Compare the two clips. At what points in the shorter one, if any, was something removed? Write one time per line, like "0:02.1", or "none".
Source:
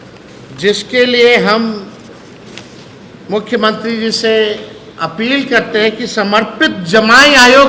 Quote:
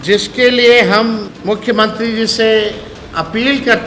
0:01.3